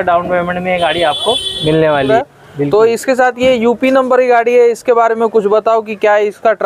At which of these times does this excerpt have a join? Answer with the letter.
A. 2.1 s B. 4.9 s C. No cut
A